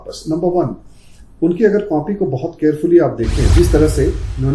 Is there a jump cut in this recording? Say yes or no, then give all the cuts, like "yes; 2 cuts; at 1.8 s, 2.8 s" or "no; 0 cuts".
yes; 1 cut; at 3.4 s